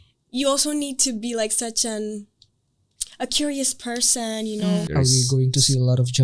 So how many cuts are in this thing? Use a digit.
1